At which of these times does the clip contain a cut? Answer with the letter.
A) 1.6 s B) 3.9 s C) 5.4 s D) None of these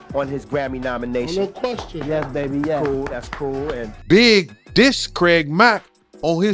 B